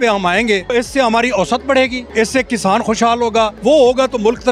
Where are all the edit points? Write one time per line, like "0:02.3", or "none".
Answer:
0:00.7
0:03.6